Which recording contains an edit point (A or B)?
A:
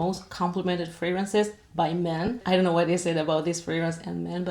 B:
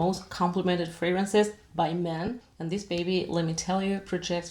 B